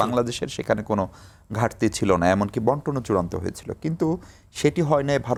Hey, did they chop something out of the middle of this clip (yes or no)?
no